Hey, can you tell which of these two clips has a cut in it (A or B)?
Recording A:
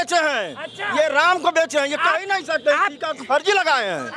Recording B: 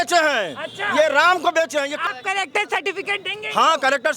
B